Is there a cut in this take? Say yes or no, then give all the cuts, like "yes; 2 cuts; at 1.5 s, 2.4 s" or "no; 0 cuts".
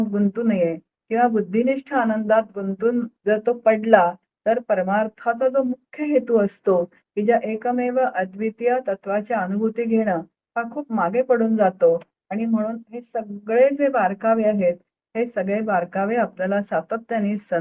yes; 1 cut; at 3.1 s